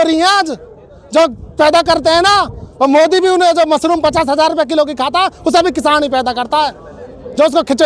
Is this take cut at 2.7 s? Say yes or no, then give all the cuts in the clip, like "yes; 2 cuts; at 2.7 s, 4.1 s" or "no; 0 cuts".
no; 0 cuts